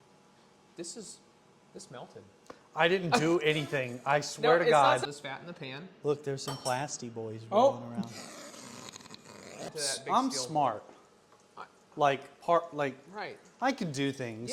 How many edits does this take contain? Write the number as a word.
two